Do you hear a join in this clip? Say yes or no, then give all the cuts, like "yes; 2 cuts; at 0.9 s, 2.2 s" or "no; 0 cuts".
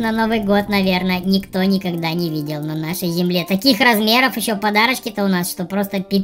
no; 0 cuts